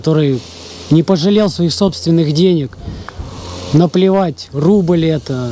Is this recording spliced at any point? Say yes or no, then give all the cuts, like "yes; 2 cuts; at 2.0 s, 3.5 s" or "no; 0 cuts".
no; 0 cuts